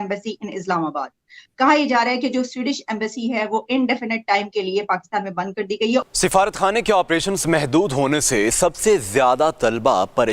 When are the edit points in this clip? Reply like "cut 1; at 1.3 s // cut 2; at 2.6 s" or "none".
cut 1; at 6.1 s